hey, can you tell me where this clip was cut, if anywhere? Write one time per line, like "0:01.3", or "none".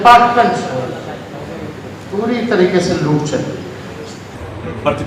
0:04.0